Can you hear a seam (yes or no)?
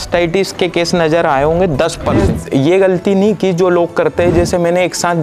yes